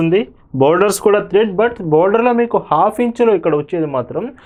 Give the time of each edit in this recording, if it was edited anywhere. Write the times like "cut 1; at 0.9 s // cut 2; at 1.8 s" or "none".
none